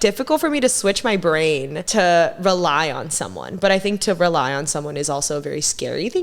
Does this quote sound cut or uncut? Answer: cut